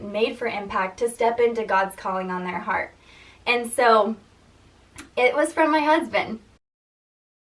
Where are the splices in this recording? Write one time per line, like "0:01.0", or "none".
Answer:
none